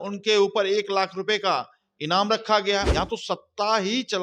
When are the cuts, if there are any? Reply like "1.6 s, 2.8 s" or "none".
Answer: 2.9 s